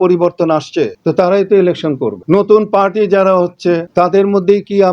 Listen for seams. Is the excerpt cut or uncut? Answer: cut